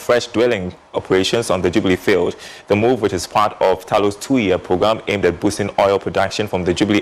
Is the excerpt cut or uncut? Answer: uncut